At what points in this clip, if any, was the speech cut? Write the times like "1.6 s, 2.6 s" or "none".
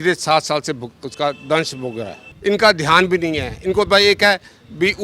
2.2 s